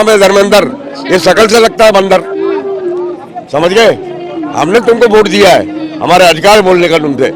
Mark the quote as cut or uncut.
uncut